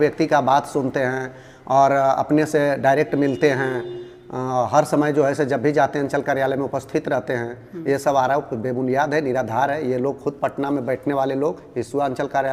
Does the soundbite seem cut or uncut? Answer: uncut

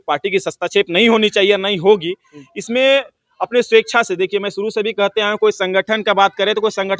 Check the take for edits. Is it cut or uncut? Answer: uncut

